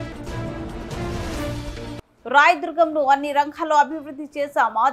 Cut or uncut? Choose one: cut